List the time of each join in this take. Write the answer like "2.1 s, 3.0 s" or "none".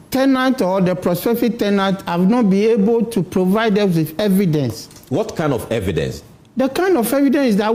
none